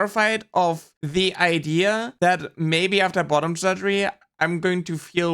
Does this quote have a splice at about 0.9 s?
yes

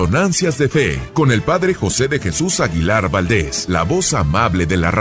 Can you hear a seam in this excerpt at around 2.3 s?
no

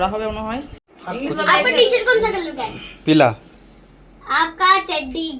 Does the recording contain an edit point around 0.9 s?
yes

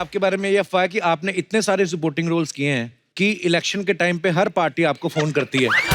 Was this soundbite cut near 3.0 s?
yes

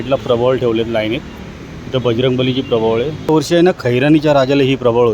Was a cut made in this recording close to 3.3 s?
yes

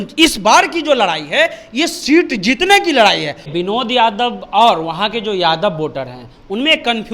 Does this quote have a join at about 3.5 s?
yes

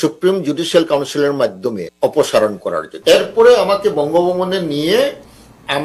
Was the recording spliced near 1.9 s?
yes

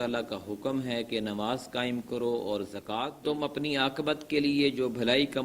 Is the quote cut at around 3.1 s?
yes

